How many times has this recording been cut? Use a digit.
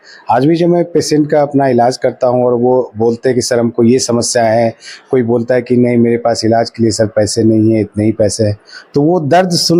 0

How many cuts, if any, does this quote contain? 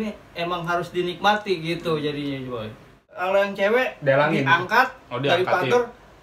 1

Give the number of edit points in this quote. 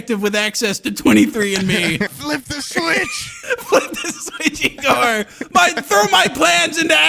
2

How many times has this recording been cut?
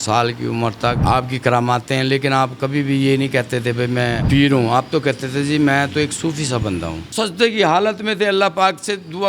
3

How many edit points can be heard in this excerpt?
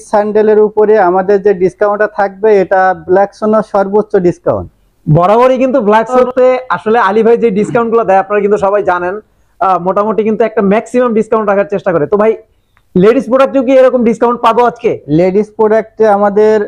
0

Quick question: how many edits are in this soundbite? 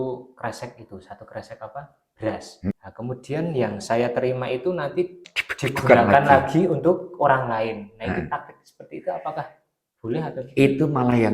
1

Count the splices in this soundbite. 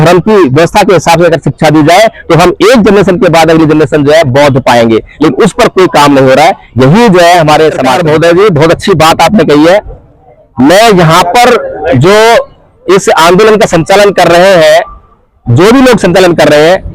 1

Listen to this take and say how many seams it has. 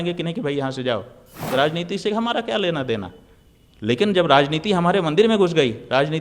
1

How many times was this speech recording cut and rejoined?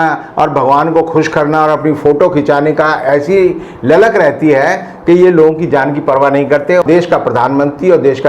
1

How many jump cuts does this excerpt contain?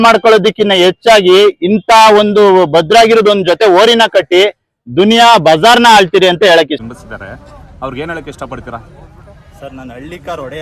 1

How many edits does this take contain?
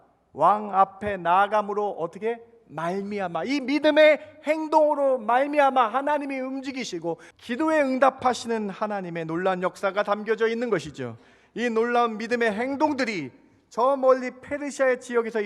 1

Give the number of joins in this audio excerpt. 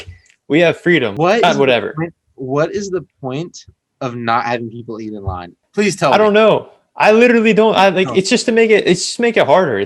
2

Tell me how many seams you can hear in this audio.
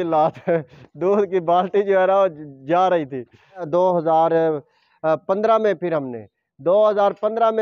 1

